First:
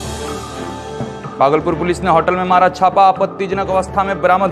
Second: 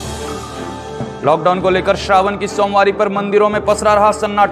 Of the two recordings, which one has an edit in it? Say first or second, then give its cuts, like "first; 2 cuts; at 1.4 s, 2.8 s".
second; 1 cut; at 0.9 s